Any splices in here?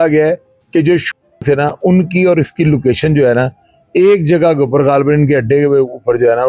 no; 0 cuts

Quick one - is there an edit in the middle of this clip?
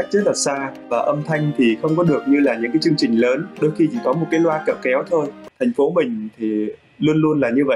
yes; 1 cut; at 5.4 s

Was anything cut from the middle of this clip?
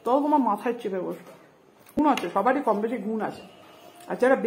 yes; 1 cut; at 2.0 s

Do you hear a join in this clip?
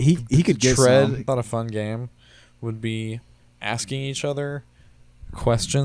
yes; 1 cut; at 1.2 s

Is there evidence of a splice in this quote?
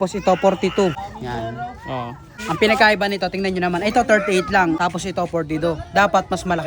yes; 3 cuts; at 1.0 s, 2.3 s, 4.8 s

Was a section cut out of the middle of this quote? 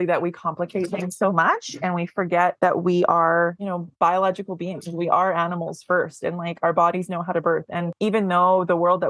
yes; 3 cuts; at 2.5 s, 3.6 s, 7.9 s

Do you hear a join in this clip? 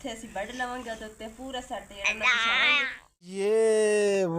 yes; 1 cut; at 3.4 s

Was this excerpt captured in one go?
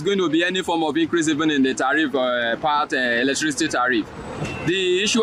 yes; 0 cuts

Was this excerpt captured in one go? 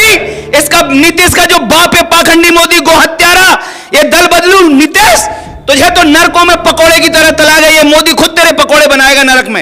yes; 0 cuts

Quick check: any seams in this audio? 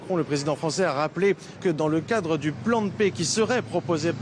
yes; 1 cut; at 1.6 s

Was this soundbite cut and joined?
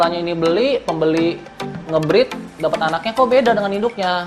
no; 0 cuts

